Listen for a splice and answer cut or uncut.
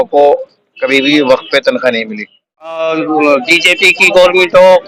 cut